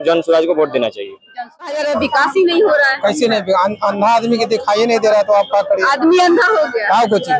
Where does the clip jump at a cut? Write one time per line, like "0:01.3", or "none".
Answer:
0:01.7